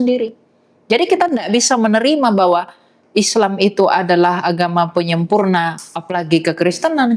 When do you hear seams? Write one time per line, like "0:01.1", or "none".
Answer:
none